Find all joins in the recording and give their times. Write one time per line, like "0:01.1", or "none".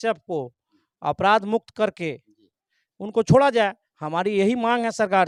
none